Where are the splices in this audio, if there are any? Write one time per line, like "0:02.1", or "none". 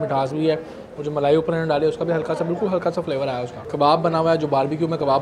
none

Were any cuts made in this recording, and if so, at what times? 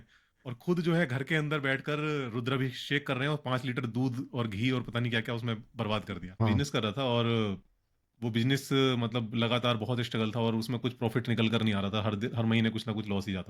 0:06.4

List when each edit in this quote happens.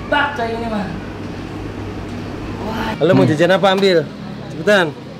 0:02.9

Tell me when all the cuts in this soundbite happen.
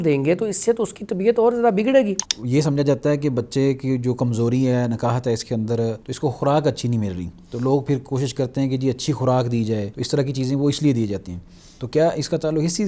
0:02.3
0:06.1
0:09.9

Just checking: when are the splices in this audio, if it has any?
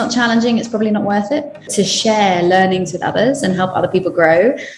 0:01.7

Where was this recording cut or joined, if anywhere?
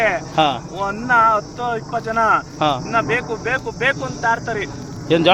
none

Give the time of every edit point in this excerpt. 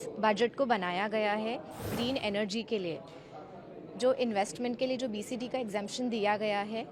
0:01.9

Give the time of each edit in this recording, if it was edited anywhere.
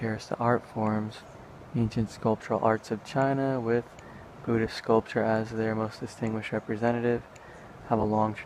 none

